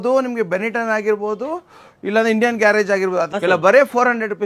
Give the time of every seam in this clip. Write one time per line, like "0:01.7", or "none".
0:03.3